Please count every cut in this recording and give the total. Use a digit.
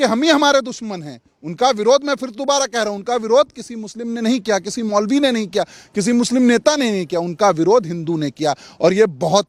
0